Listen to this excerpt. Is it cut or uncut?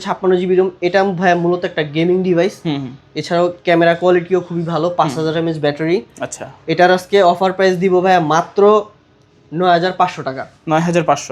uncut